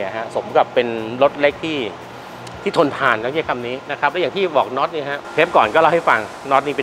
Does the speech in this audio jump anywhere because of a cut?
no; 0 cuts

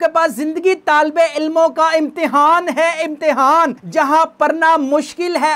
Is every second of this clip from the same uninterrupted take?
yes; 0 cuts

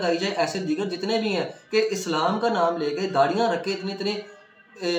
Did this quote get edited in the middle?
no; 0 cuts

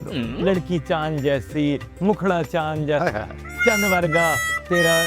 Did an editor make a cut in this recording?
no; 0 cuts

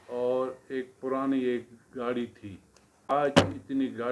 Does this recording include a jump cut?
yes; 1 cut; at 3.1 s

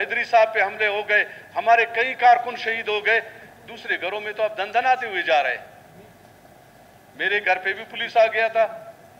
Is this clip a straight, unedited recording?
no; 1 cut; at 3.5 s

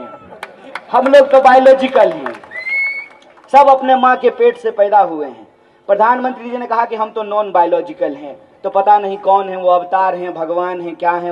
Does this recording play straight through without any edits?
yes; 0 cuts

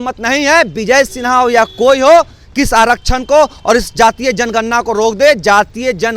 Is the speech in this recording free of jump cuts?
yes; 0 cuts

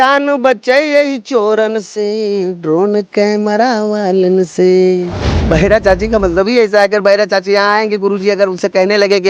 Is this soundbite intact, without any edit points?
no; 1 cut; at 5.4 s

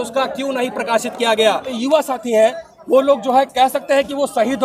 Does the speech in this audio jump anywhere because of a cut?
yes; 1 cut; at 1.7 s

